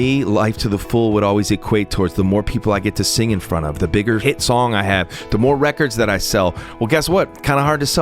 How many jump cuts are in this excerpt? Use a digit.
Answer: 1